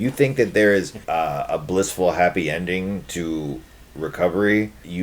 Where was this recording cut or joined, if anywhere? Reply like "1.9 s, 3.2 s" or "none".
1.0 s